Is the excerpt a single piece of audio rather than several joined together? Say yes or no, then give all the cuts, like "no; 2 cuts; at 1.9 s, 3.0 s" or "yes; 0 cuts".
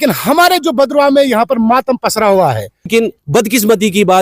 no; 1 cut; at 2.9 s